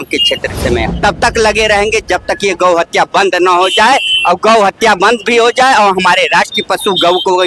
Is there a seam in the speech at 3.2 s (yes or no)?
no